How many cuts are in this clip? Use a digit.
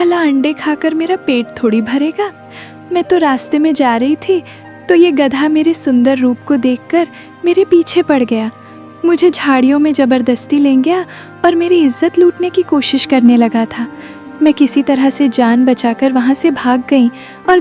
0